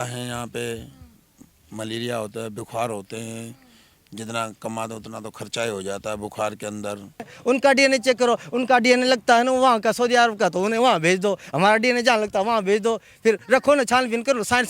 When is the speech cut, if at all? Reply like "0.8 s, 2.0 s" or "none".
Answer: 7.3 s